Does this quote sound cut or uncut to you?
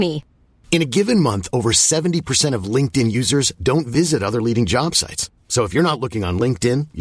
uncut